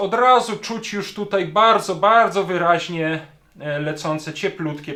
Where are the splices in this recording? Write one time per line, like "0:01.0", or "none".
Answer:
none